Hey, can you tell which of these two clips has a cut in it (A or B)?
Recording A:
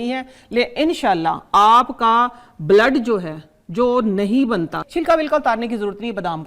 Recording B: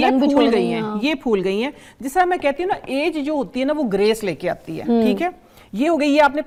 A